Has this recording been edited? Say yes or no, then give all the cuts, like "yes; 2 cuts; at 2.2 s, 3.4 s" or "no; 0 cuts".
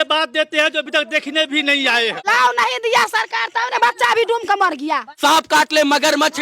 yes; 2 cuts; at 2.2 s, 5.2 s